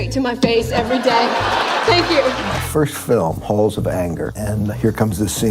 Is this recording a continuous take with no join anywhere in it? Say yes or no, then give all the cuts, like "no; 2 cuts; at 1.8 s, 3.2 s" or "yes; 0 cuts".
no; 2 cuts; at 2.5 s, 4.4 s